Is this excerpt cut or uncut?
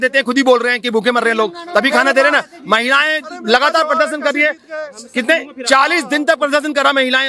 uncut